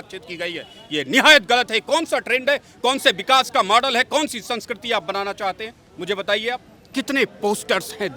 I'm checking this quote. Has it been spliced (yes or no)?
yes